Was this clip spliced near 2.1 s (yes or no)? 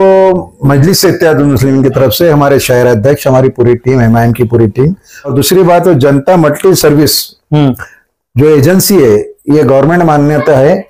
no